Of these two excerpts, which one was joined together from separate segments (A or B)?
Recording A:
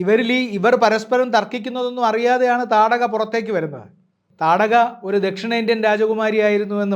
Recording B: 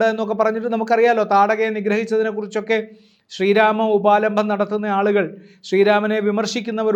A